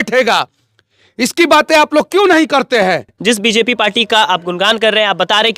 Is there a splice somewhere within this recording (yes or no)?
yes